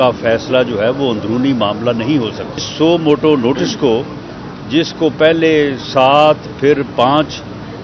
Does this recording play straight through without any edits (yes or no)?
no